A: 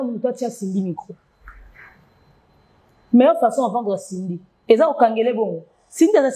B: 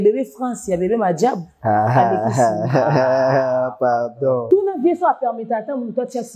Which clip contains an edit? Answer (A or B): B